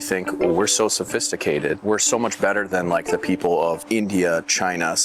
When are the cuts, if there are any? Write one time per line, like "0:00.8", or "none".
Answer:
0:01.8
0:03.8